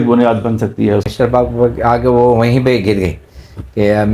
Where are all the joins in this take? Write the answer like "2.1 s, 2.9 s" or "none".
1.1 s

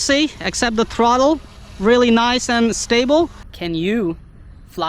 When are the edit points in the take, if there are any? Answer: 3.5 s

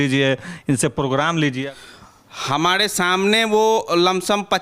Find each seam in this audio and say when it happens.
1.6 s

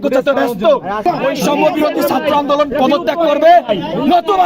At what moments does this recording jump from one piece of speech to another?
1.0 s

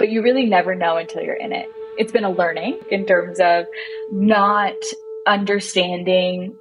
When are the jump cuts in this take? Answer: 1.6 s, 2.9 s

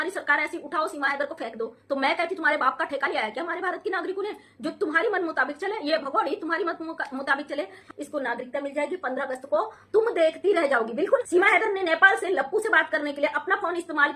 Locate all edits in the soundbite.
7.8 s, 11.2 s

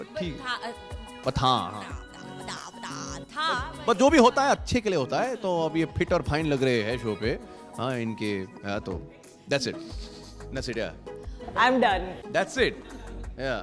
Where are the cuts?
9.3 s

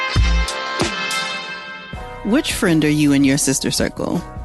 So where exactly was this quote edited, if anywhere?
1.4 s

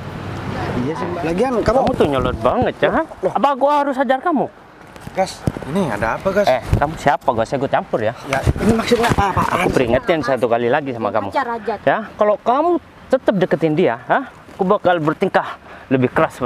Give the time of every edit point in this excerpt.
1.1 s, 8.5 s

